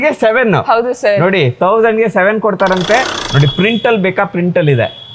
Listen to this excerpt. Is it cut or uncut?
cut